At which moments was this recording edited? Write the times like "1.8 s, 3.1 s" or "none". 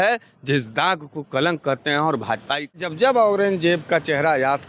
2.8 s